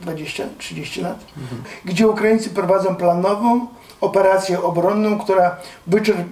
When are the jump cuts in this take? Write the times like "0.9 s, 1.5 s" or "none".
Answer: 1.7 s